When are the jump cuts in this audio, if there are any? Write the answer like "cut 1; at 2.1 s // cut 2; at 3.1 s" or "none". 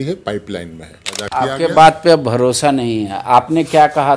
cut 1; at 1.1 s